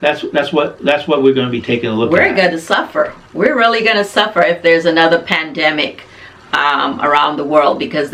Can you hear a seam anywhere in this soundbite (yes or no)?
no